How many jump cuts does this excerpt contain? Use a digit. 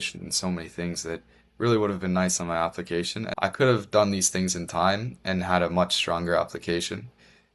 1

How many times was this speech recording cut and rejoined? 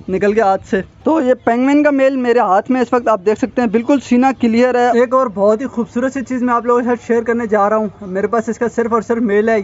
2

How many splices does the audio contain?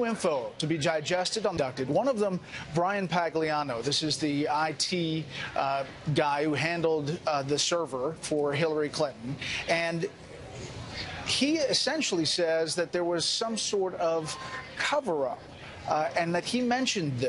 0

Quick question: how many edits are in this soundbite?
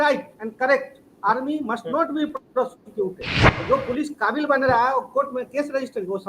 1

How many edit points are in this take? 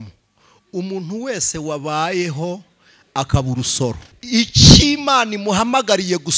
1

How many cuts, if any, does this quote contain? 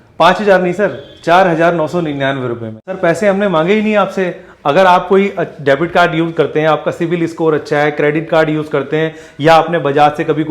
1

